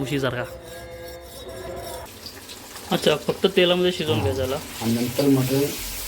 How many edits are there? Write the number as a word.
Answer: one